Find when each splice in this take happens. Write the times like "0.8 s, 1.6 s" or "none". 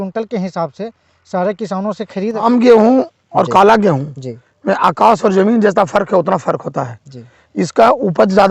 2.4 s